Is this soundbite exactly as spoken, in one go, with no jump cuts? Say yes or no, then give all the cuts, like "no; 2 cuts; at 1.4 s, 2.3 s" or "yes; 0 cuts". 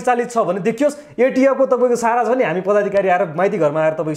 yes; 0 cuts